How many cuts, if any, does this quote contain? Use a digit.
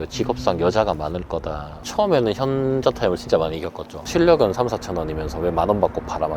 2